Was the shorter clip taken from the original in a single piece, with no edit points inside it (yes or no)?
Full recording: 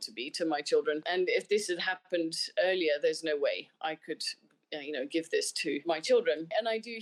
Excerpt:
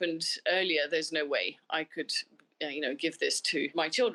yes